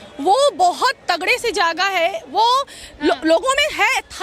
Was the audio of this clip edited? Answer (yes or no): no